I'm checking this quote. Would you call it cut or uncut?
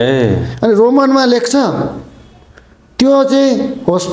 uncut